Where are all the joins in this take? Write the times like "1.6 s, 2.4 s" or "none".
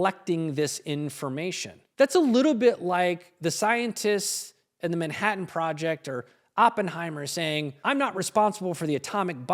7.7 s